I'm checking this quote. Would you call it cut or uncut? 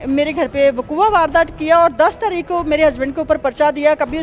uncut